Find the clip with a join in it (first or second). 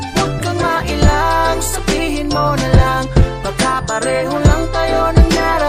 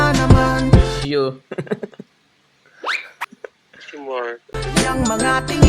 second